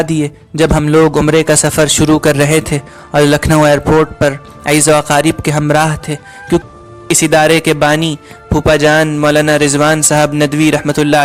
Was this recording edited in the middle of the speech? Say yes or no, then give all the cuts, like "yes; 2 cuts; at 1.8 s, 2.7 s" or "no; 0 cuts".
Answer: yes; 1 cut; at 6.6 s